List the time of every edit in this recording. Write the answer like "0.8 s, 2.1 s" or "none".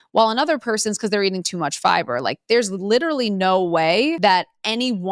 4.2 s